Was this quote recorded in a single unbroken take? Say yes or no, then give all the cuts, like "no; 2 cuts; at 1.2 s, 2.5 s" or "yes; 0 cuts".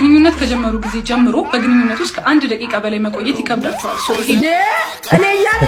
yes; 0 cuts